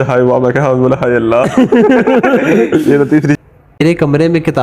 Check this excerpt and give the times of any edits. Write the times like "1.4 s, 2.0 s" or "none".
3.4 s